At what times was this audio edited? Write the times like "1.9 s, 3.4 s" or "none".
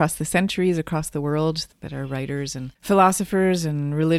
2.7 s